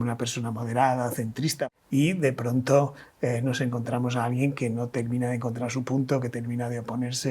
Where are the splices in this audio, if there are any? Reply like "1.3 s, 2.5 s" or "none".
1.6 s